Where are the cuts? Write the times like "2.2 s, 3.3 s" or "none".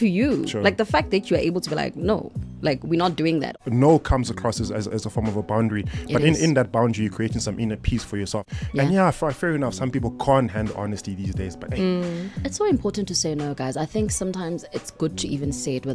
3.5 s, 8.5 s